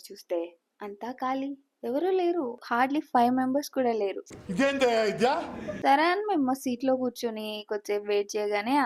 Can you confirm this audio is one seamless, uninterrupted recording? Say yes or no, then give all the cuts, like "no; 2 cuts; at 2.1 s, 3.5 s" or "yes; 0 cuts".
yes; 0 cuts